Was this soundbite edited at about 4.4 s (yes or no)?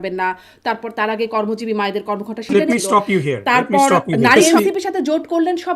yes